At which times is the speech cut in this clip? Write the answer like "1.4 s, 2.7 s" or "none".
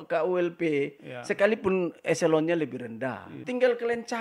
3.3 s